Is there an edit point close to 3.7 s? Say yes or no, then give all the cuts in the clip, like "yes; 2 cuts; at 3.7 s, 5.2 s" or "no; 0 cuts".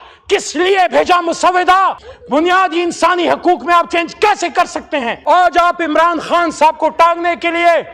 no; 2 cuts; at 2.0 s, 5.1 s